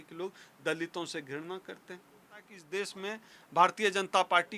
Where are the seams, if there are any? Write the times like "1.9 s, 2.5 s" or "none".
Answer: 2.6 s